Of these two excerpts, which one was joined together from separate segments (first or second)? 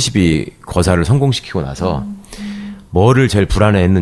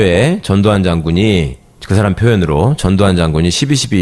first